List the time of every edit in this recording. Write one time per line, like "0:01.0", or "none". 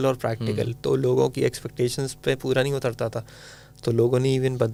none